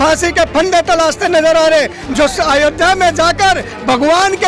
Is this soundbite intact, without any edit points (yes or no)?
no